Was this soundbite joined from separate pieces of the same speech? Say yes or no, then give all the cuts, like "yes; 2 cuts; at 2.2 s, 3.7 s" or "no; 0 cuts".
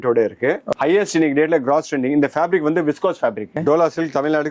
yes; 2 cuts; at 0.8 s, 3.6 s